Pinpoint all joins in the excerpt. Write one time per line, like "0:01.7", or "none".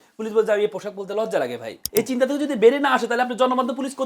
0:01.8